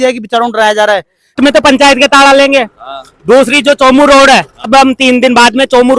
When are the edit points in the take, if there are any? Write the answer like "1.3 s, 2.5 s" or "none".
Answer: 1.4 s, 4.7 s